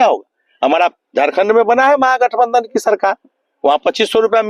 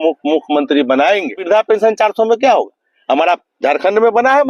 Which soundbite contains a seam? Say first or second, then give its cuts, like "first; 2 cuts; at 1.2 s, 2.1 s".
second; 1 cut; at 1.4 s